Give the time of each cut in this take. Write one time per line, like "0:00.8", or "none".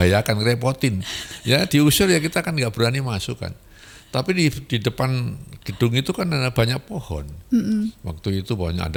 none